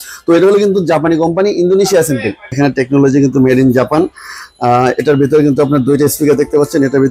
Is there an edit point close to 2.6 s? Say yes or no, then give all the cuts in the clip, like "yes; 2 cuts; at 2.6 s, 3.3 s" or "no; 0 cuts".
yes; 1 cut; at 2.6 s